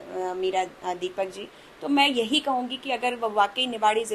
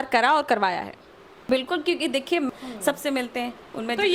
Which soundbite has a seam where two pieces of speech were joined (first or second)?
second